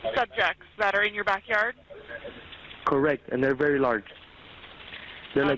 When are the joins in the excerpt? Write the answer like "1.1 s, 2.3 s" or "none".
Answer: none